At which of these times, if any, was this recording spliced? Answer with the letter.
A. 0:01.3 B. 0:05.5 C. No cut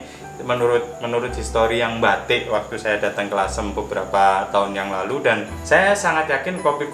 B